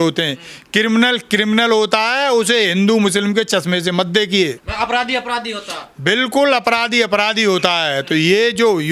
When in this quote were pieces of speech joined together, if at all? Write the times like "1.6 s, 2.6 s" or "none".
none